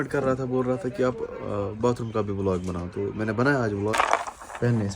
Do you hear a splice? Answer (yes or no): yes